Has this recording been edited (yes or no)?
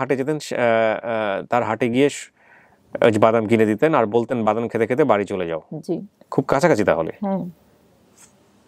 no